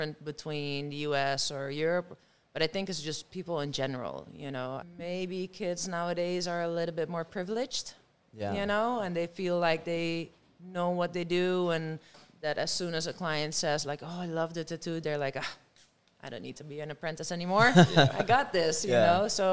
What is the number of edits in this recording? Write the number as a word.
zero